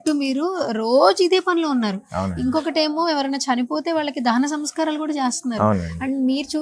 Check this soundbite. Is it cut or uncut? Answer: uncut